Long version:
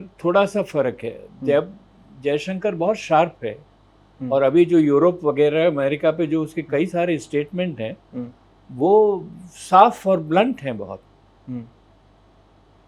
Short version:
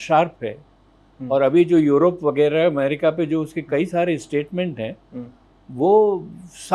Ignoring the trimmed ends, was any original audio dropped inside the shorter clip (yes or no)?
no